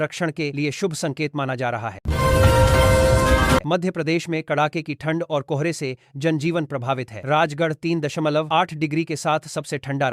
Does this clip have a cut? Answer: yes; 2 cuts; at 2.0 s, 3.6 s

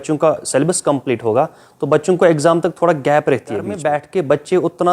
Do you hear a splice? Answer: yes; 1 cut; at 3.8 s

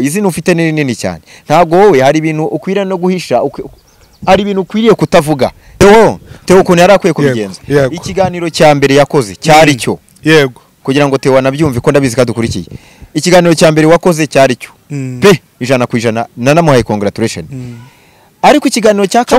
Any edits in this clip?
yes; 1 cut; at 5.8 s

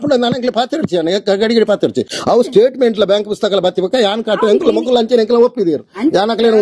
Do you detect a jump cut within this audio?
no; 0 cuts

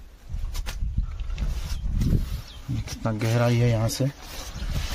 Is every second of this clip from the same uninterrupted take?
yes; 0 cuts

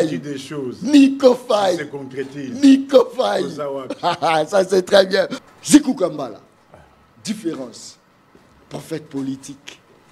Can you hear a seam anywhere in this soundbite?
yes; 1 cut; at 5.4 s

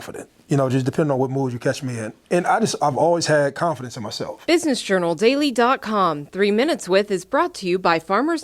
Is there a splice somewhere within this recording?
yes; 1 cut; at 4.4 s

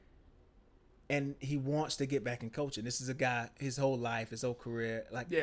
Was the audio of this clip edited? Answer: no; 0 cuts

